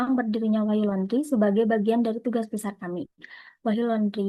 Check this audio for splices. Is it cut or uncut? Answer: uncut